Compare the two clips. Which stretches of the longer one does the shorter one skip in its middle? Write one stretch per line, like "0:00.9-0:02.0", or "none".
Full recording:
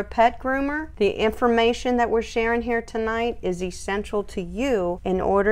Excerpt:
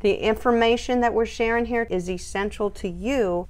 0:02.8-0:03.4